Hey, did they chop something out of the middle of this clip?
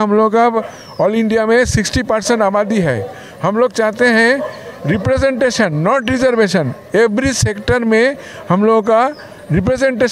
no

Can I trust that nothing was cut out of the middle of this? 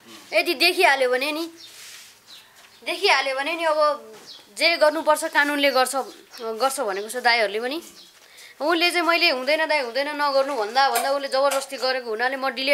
yes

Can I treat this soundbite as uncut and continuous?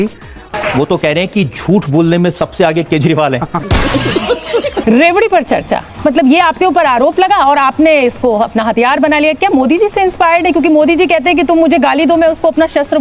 no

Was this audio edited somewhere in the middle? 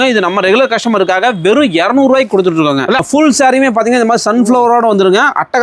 yes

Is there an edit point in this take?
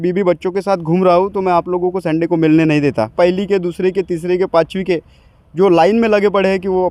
yes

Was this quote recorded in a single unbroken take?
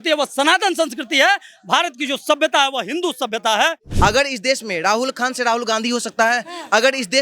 no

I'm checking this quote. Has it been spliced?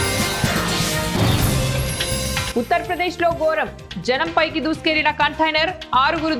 no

